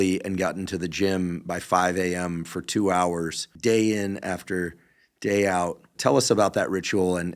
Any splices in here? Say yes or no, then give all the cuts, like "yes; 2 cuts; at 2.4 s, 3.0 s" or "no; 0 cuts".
yes; 2 cuts; at 3.4 s, 5.9 s